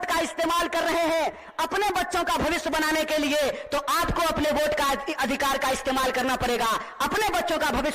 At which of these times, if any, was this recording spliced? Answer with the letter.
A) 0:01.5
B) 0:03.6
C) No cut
C